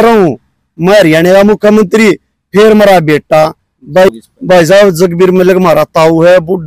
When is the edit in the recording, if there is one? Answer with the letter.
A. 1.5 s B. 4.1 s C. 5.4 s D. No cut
B